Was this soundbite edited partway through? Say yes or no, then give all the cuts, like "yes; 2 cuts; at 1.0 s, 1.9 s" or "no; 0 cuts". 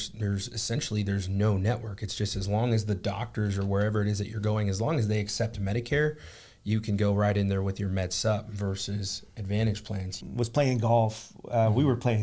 yes; 1 cut; at 10.2 s